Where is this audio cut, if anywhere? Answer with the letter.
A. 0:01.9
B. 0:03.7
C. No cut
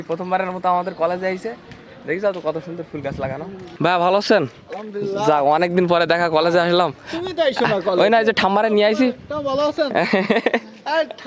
B